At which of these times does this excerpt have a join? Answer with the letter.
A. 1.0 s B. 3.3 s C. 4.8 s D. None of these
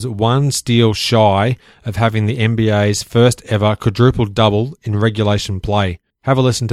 D